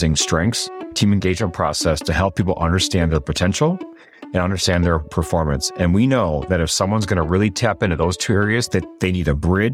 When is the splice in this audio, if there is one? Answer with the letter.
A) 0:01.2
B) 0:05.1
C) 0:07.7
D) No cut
A